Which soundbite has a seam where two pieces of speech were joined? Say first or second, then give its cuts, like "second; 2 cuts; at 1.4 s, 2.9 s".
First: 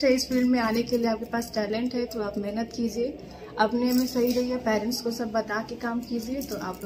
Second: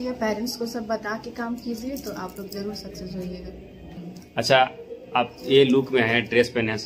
second; 1 cut; at 3.8 s